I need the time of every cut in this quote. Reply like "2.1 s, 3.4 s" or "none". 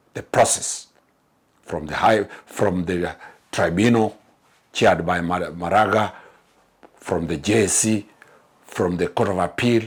none